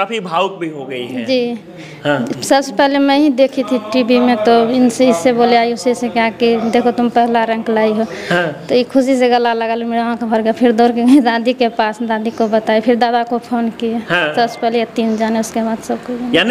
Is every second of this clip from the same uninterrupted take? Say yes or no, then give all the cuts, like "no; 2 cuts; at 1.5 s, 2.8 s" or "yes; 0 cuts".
yes; 0 cuts